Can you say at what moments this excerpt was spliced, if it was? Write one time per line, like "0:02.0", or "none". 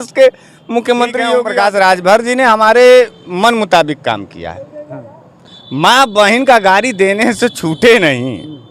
0:01.4

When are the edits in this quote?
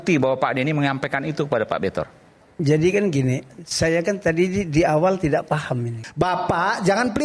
0:06.0

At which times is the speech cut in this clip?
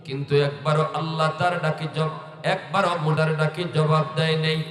0:03.2

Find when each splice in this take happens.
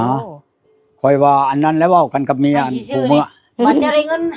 0:03.4

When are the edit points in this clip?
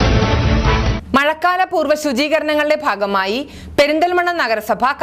0:00.9

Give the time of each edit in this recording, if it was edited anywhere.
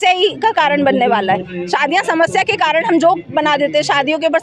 none

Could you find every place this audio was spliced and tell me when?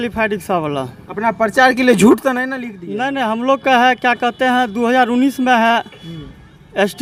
none

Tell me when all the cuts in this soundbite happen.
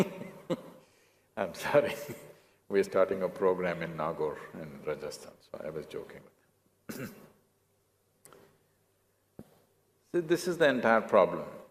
0:01.1

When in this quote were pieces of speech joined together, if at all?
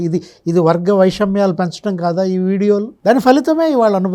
0:02.9

